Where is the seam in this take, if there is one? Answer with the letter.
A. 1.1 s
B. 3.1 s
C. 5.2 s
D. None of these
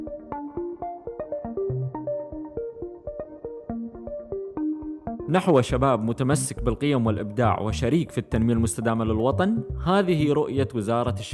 C